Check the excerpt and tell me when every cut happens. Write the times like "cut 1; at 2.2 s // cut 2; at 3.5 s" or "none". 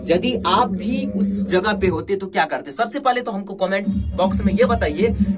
none